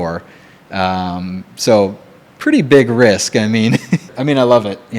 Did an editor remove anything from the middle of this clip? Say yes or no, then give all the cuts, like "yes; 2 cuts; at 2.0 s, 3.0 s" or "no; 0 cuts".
yes; 1 cut; at 4.1 s